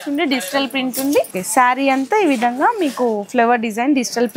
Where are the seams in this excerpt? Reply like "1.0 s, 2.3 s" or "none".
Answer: 1.4 s